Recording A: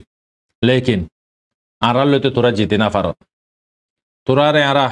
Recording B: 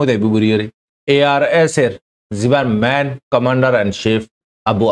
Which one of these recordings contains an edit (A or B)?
B